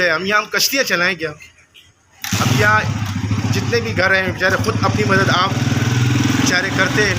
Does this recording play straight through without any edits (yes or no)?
yes